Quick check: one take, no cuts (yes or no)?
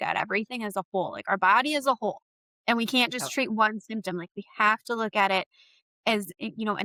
yes